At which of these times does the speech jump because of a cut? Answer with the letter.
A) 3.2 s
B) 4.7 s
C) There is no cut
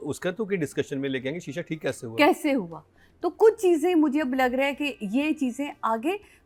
C